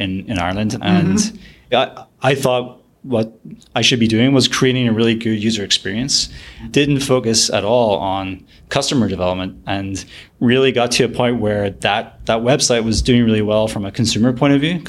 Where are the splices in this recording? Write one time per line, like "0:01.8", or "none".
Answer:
0:00.8
0:01.7
0:06.7